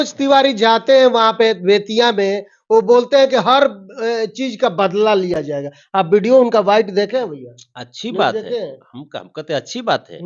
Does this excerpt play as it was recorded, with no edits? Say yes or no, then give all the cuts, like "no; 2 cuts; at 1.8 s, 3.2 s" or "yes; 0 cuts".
yes; 0 cuts